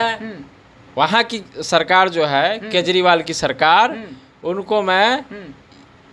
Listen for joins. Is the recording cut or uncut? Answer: uncut